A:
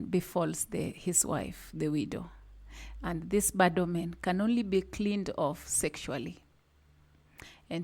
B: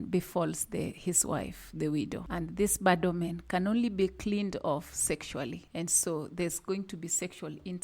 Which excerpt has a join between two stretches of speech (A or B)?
B